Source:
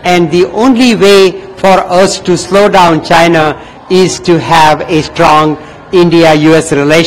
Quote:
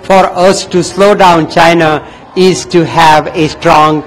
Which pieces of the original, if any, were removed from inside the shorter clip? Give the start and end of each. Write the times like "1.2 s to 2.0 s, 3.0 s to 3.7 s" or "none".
none